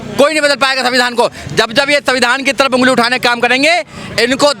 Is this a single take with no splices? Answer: yes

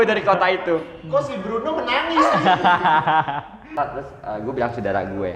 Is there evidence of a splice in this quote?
yes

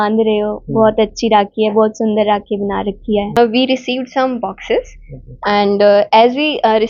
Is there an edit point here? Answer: yes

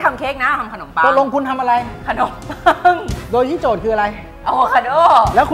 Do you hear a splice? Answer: yes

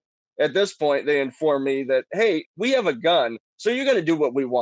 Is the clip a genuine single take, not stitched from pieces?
yes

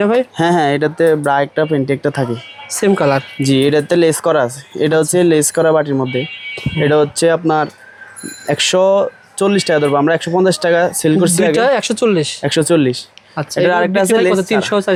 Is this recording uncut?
yes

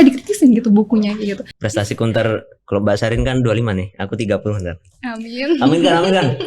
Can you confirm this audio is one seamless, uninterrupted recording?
no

